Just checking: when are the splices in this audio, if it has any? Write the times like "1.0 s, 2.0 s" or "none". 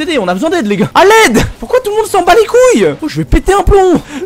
0.9 s, 1.6 s